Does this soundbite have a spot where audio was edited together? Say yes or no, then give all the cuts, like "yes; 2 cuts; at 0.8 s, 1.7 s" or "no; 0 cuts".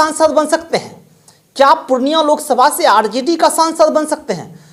no; 0 cuts